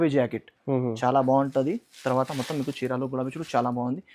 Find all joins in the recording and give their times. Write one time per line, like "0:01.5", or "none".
none